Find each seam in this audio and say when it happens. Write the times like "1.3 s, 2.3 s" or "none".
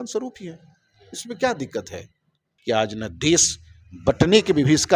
2.5 s

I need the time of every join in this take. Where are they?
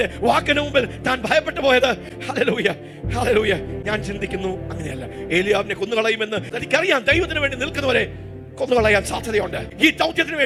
none

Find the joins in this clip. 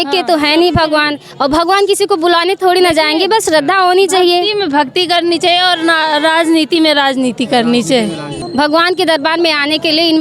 8.4 s

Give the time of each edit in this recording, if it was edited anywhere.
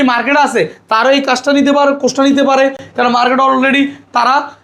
none

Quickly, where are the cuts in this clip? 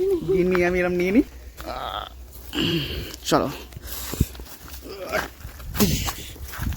1.4 s

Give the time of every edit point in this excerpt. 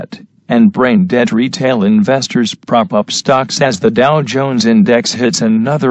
3.7 s

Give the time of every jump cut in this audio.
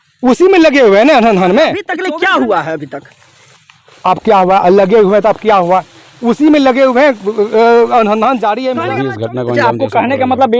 1.9 s, 8.7 s

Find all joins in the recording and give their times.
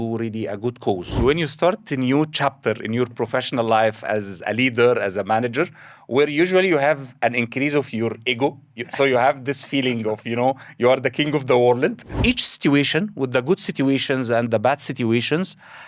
1.2 s, 12.1 s

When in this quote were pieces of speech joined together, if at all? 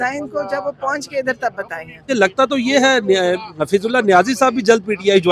2.1 s

